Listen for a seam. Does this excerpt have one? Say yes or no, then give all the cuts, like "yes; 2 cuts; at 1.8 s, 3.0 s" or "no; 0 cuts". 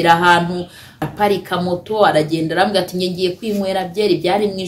yes; 1 cut; at 1.1 s